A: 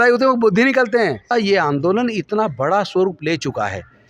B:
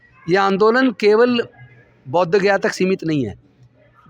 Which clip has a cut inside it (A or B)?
A